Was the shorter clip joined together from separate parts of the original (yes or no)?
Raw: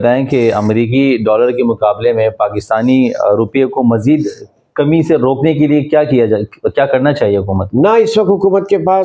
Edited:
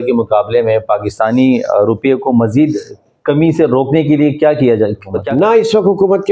yes